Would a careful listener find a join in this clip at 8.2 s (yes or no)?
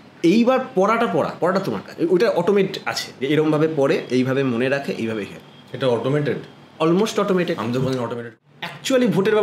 yes